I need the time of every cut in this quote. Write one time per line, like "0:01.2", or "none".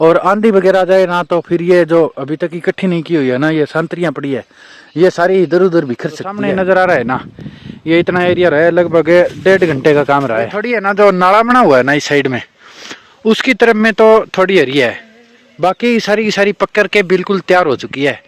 0:06.4
0:10.7